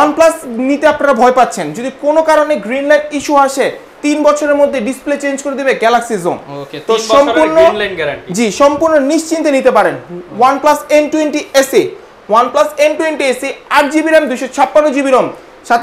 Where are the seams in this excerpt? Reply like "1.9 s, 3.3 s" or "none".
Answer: none